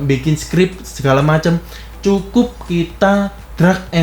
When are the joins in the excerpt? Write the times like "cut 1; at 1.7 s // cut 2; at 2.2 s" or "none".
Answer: none

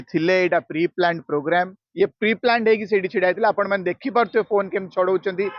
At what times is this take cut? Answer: cut 1; at 1.8 s

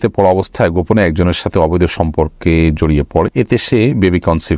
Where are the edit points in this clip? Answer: cut 1; at 3.3 s

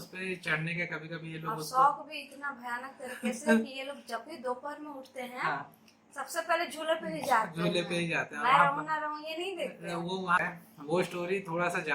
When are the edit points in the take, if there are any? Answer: cut 1; at 10.4 s

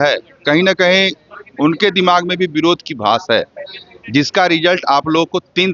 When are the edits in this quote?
none

